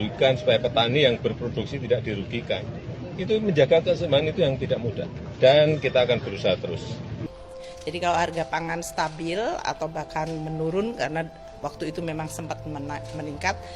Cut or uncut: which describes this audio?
cut